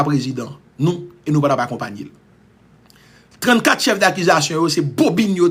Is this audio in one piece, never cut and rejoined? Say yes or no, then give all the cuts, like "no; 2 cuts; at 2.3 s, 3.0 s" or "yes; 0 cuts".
yes; 0 cuts